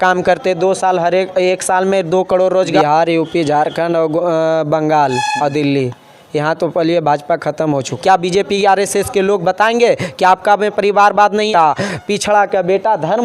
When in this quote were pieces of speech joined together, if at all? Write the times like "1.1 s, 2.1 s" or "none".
2.8 s, 7.9 s, 11.5 s